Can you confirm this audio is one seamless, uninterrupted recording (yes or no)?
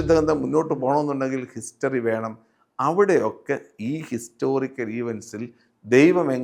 yes